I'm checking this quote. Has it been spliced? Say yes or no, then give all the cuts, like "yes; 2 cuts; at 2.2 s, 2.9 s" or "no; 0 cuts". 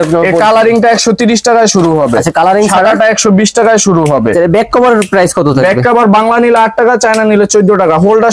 no; 0 cuts